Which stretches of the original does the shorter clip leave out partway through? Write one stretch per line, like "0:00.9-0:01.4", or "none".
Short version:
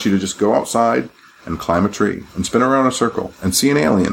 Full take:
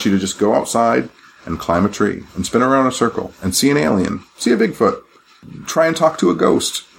none